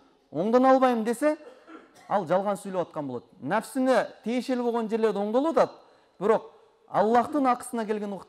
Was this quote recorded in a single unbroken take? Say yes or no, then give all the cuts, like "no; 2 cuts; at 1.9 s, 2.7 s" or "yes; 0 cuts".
yes; 0 cuts